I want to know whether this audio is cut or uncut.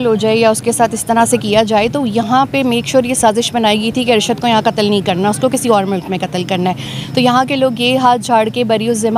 uncut